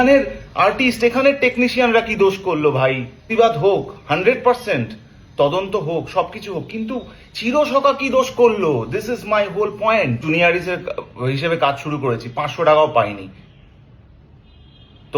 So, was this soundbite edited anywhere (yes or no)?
yes